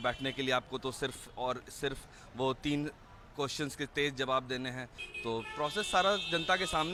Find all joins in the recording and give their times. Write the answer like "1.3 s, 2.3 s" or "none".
none